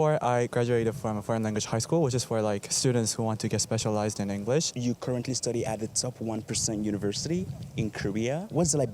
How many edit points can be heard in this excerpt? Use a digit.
1